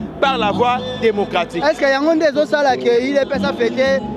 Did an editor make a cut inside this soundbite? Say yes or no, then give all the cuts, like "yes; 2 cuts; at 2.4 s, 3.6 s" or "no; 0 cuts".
no; 0 cuts